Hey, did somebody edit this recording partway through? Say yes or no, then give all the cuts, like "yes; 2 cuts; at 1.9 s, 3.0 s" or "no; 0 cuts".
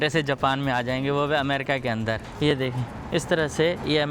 yes; 1 cut; at 2.3 s